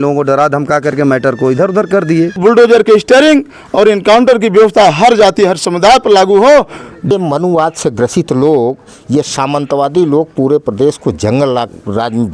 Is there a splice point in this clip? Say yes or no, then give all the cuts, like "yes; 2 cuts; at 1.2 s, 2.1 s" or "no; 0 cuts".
yes; 2 cuts; at 2.4 s, 7.1 s